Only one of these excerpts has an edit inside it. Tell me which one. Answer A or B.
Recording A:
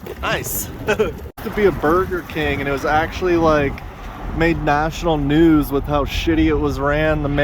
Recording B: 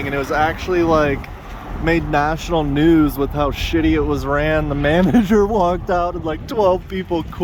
A